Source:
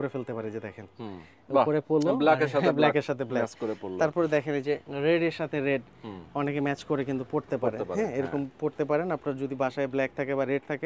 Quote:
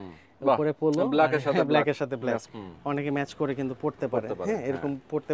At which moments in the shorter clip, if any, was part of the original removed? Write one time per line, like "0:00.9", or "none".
0:02.5

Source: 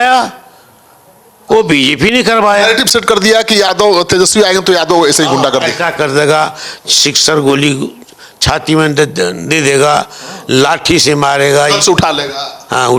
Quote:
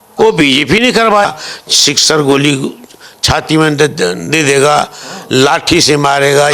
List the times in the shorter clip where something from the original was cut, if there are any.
0:01.2

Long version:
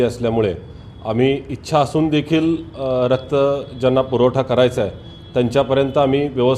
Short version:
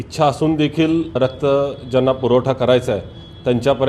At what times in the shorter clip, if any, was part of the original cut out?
0:01.2

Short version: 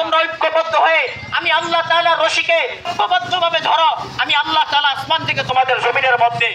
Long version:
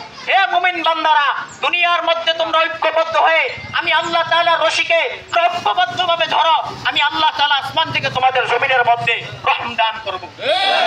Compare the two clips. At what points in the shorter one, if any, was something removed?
0:02.9

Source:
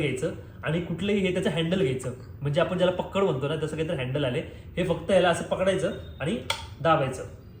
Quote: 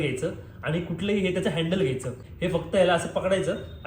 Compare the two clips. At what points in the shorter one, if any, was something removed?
0:02.2

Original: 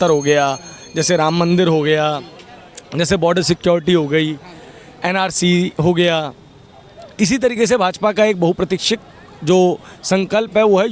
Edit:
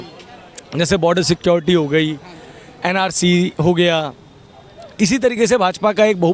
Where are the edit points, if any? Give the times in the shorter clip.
none

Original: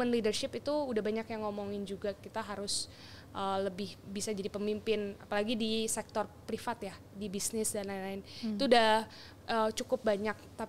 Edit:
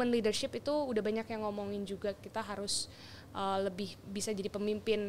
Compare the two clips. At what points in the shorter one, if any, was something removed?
none

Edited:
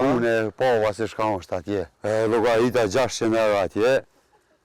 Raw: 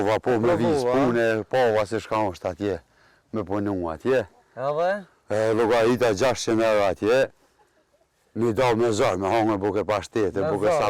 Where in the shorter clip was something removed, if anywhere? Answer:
0:01.9

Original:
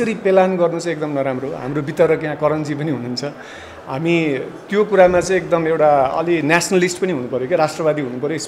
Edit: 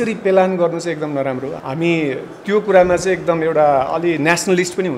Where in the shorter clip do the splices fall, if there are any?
0:01.5

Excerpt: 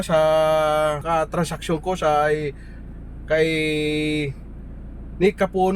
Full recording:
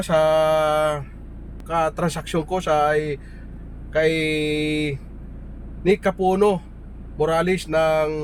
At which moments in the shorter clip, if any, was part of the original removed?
0:01.0

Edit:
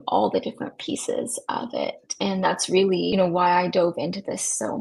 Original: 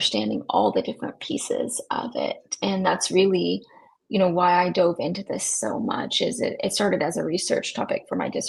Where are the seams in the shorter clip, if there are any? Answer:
0:03.1

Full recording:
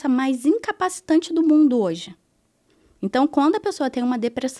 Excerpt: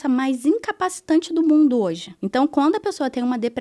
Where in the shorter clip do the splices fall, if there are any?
0:02.1

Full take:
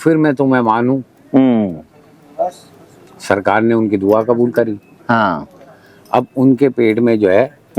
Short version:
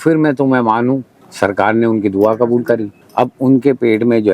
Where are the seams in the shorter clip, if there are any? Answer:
0:01.1
0:03.0

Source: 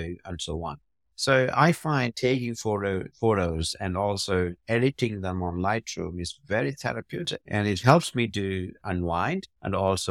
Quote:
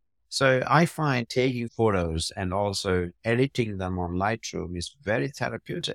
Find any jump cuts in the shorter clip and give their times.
0:01.7

